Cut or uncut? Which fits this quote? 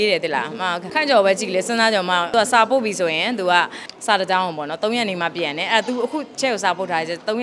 cut